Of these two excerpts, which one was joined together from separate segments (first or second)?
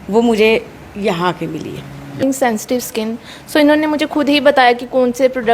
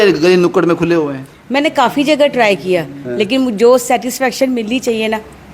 first